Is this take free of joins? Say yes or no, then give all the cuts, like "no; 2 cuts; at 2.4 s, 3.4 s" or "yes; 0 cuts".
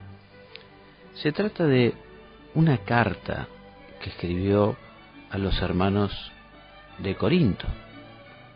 yes; 0 cuts